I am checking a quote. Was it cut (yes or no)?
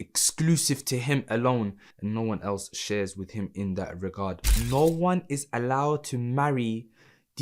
yes